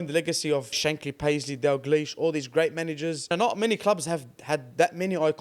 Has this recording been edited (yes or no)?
yes